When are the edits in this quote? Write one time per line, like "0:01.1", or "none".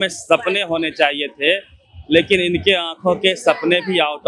none

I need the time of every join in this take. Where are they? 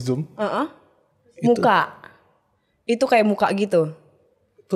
none

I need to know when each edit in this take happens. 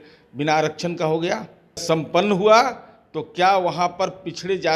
0:01.8

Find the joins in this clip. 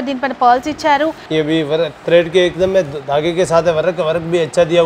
0:01.2

